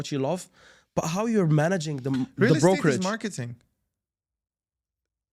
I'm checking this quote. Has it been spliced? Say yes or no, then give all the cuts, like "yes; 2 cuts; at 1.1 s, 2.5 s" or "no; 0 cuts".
no; 0 cuts